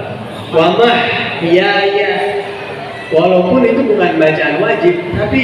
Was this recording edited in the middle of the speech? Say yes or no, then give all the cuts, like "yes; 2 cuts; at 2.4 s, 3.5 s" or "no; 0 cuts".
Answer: no; 0 cuts